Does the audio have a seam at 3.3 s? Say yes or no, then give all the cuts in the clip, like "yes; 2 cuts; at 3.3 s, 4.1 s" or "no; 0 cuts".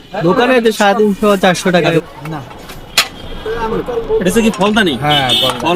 no; 2 cuts; at 2.0 s, 4.6 s